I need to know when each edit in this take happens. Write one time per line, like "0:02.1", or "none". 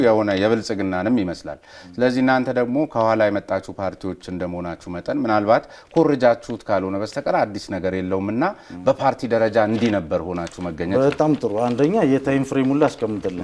none